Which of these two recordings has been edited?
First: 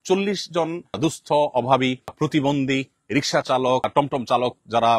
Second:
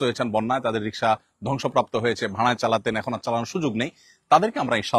first; 3 cuts; at 1.0 s, 2.1 s, 3.9 s

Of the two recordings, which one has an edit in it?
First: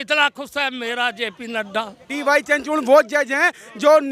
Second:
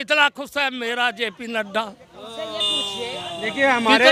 first; 1 cut; at 2.1 s

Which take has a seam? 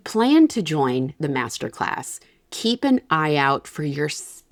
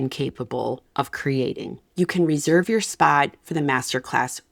second; 2 cuts; at 0.8 s, 1.8 s

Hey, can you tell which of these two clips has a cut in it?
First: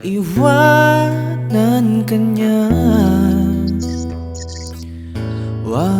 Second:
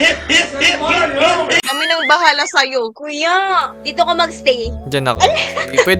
second; 2 cuts; at 1.7 s, 3.8 s

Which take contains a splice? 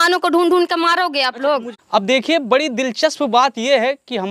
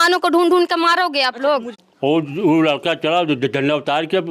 second; 1 cut; at 1.8 s

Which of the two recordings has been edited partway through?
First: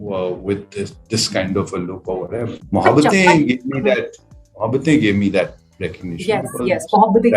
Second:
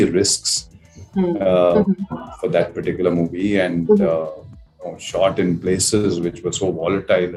first; 1 cut; at 2.6 s

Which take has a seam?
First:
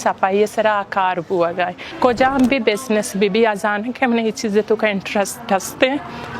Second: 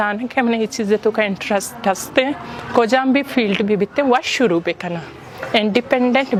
first; 1 cut; at 1.8 s

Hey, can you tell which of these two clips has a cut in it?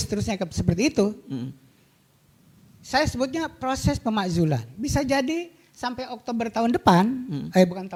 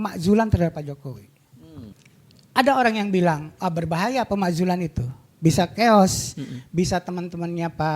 second; 1 cut; at 1.9 s

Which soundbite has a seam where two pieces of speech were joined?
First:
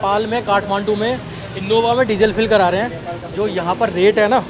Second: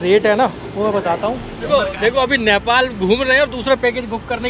second; 1 cut; at 1.7 s

